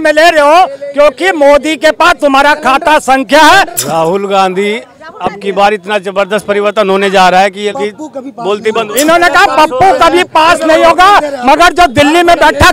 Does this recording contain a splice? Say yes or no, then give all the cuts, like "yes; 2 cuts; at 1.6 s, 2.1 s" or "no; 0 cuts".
yes; 2 cuts; at 3.8 s, 7.7 s